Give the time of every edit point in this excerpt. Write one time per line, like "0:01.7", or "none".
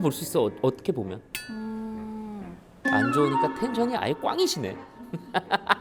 none